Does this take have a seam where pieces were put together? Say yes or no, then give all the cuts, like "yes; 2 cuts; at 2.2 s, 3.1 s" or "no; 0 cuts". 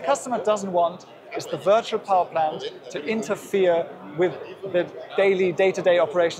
no; 0 cuts